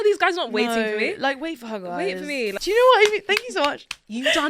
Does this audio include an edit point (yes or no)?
yes